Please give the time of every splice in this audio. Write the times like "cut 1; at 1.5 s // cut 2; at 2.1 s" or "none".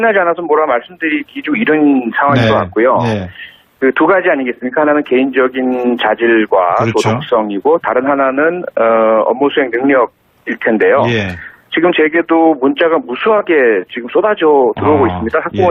cut 1; at 11.3 s